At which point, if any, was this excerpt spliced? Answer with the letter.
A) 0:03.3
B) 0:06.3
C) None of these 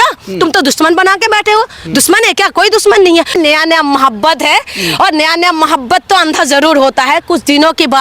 A